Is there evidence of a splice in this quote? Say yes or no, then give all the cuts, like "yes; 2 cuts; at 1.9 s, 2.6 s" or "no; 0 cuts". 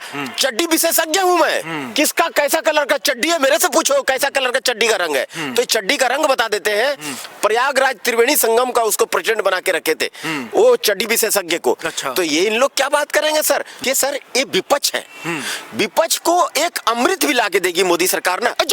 yes; 1 cut; at 13.8 s